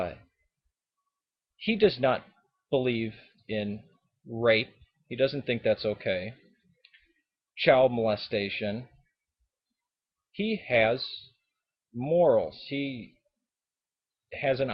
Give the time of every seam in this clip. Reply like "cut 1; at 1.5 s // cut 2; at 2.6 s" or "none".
cut 1; at 3.8 s